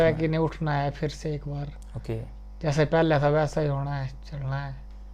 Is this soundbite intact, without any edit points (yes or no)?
yes